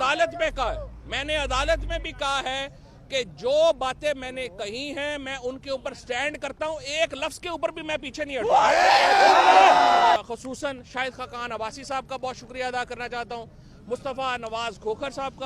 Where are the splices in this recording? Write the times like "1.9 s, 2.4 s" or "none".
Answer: 10.2 s

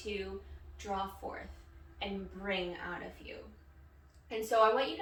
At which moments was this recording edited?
none

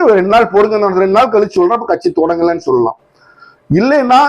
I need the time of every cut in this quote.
none

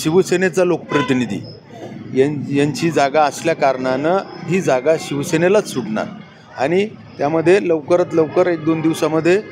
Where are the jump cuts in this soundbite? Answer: none

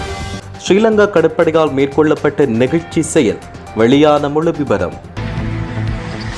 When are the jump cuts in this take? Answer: 5.1 s

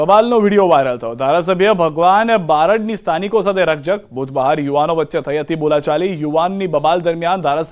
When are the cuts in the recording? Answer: 4.5 s

